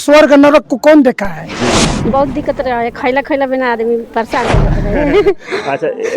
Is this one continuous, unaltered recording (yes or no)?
no